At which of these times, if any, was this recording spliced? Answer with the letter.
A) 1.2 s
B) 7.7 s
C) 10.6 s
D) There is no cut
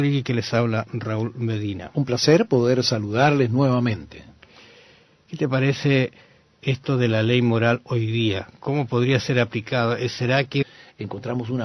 D